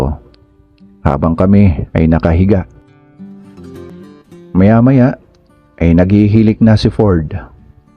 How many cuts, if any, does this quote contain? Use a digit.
1